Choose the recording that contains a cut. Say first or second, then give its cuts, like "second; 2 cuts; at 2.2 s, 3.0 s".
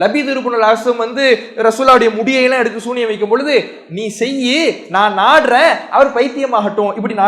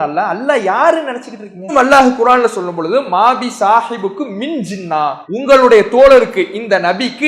second; 2 cuts; at 1.7 s, 5.2 s